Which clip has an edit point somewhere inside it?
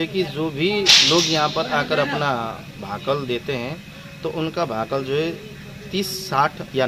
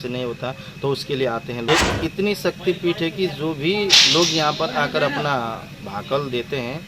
second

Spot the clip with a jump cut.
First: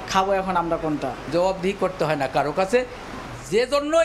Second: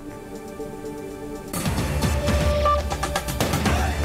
first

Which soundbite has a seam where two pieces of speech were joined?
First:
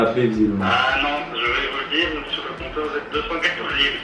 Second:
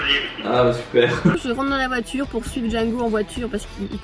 second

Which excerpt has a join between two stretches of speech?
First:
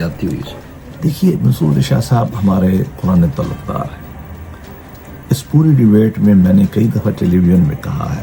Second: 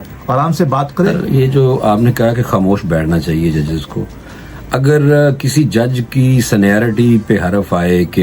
second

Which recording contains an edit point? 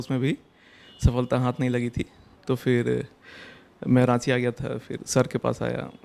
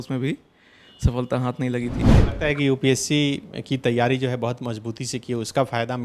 second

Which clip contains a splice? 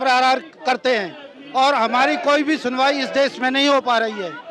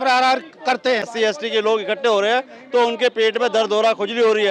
second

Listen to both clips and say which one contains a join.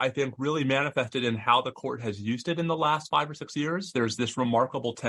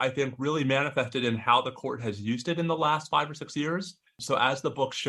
first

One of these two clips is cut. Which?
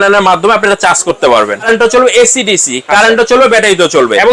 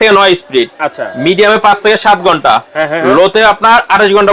first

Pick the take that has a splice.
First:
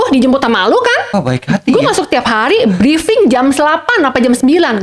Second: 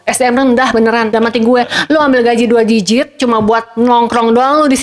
first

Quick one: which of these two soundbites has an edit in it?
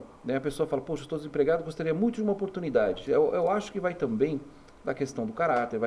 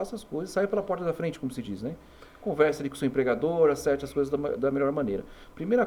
first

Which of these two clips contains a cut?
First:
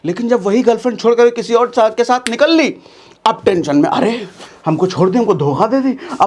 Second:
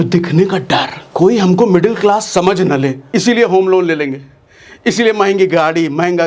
second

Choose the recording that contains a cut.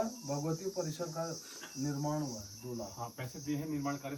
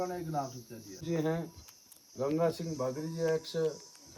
second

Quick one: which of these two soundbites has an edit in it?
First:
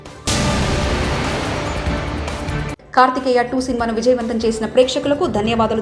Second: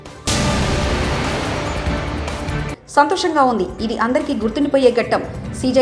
first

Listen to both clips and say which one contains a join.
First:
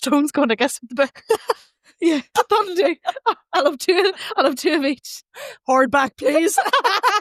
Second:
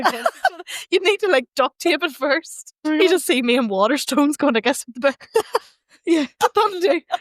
second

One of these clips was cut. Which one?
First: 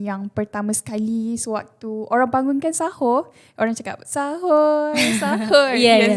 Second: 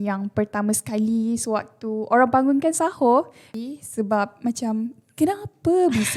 second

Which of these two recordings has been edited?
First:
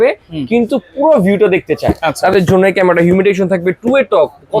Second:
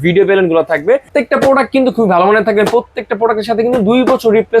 second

